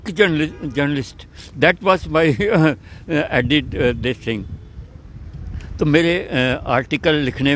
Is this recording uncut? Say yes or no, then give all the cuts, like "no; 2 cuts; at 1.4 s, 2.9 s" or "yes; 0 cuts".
yes; 0 cuts